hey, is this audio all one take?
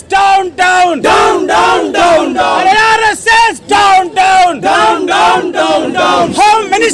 yes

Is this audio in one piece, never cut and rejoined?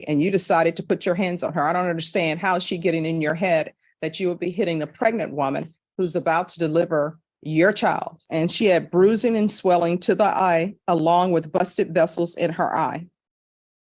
no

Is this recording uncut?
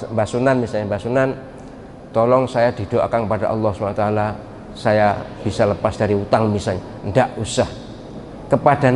yes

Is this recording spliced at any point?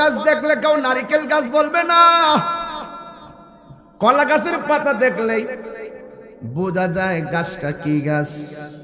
no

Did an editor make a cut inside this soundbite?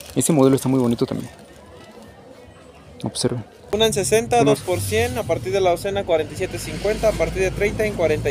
yes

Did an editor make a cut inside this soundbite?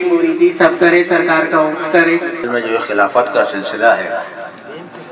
yes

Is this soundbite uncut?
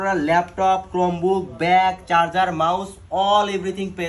yes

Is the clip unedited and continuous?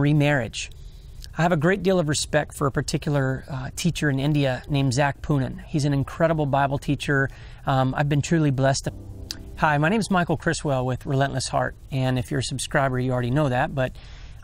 yes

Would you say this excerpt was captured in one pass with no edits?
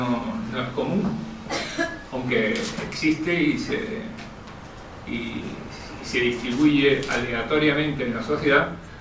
yes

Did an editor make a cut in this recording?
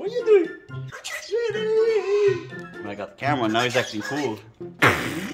no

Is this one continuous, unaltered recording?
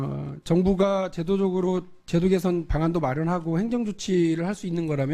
yes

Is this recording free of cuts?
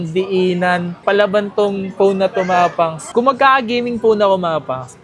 no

